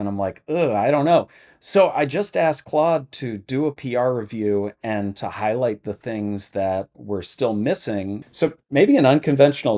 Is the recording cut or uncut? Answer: cut